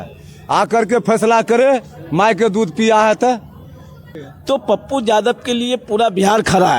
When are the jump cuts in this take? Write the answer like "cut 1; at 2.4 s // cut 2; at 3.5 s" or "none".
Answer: cut 1; at 4.2 s